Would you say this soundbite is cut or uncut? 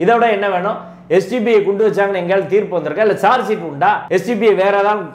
uncut